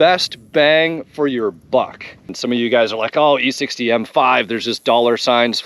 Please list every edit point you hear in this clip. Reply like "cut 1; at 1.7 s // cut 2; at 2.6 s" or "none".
cut 1; at 2.3 s